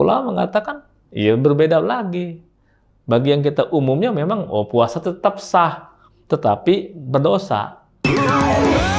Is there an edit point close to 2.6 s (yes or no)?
no